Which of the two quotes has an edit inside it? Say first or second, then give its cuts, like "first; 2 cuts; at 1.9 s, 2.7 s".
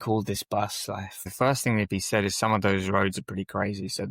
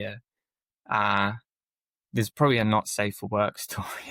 first; 1 cut; at 1.3 s